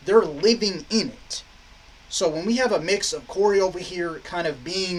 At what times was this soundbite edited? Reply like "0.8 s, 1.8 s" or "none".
none